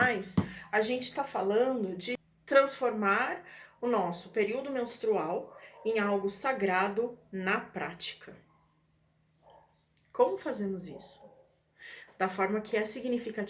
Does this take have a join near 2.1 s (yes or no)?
yes